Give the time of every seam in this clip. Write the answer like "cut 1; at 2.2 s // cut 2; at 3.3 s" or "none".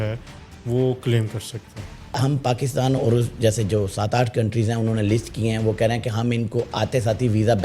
cut 1; at 2.1 s